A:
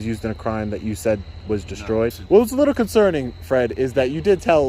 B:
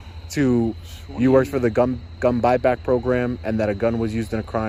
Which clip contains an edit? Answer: A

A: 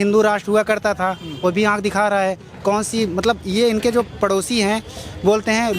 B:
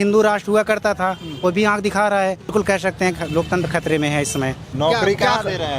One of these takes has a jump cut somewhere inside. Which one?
B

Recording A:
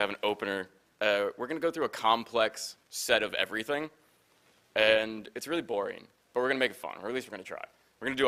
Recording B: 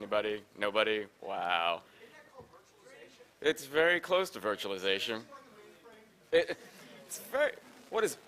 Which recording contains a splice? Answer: A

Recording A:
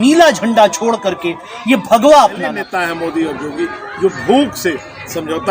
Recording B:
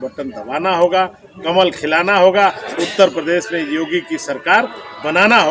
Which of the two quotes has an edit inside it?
A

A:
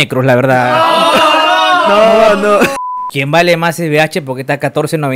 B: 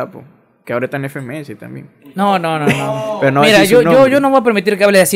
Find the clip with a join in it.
A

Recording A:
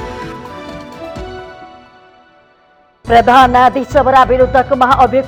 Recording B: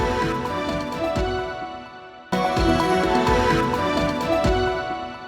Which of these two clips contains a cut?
B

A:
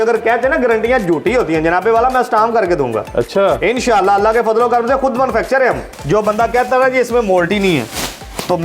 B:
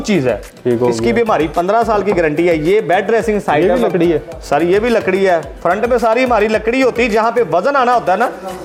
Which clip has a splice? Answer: A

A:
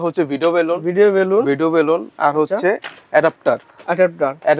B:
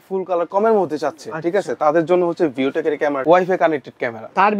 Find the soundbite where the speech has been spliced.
B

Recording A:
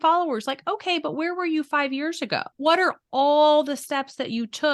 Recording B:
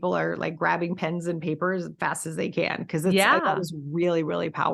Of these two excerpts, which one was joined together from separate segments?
A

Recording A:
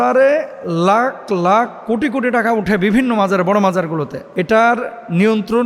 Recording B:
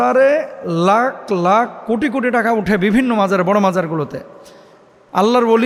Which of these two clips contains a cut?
A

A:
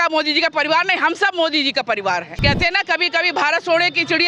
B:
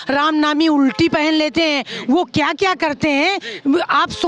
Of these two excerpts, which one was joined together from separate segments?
A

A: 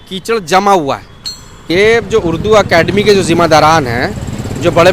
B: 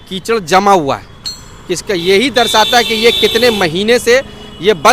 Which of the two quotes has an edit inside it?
A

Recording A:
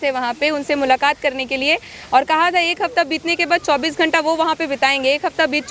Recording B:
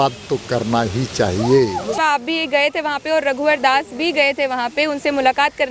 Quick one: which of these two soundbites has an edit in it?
B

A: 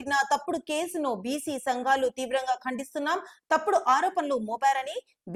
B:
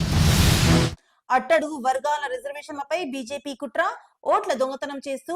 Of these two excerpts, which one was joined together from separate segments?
B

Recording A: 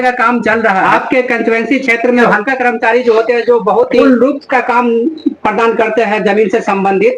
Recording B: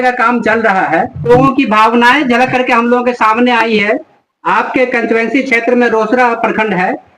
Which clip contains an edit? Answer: A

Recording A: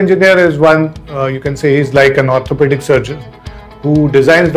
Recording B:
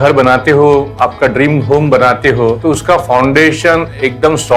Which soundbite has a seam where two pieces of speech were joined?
B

